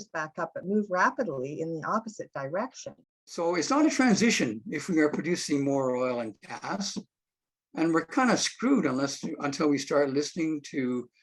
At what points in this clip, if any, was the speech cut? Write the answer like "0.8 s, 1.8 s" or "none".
3.4 s